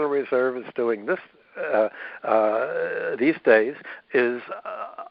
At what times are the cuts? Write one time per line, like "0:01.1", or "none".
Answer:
none

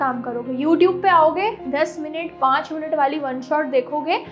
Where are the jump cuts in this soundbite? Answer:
none

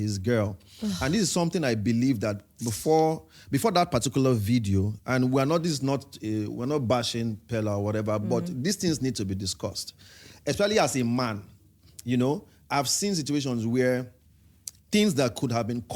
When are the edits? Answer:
none

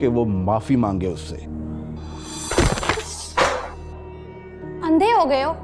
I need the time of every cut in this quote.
0:01.6
0:04.7

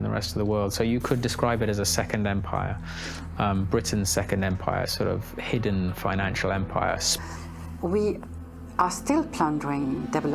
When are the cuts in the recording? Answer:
0:07.1

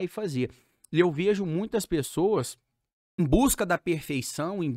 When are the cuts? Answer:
0:03.2

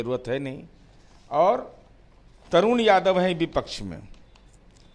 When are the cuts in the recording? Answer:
none

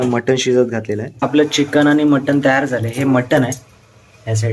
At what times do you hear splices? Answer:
0:01.3

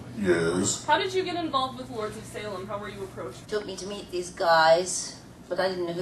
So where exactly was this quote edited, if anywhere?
none

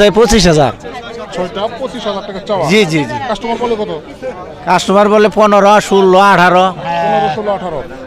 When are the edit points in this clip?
none

